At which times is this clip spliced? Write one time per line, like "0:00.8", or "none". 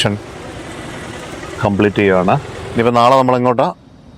0:02.6